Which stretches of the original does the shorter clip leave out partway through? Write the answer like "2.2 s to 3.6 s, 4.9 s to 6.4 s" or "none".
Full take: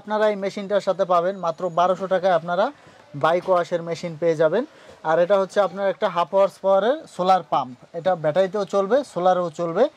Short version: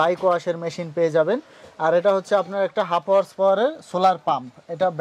none